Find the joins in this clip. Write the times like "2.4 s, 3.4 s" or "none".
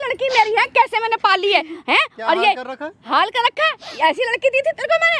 none